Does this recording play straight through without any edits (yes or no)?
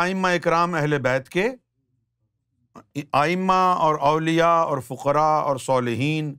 yes